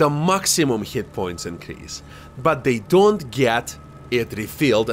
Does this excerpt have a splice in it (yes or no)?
no